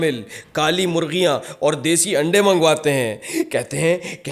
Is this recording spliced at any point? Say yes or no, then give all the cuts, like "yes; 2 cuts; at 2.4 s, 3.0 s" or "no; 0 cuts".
no; 0 cuts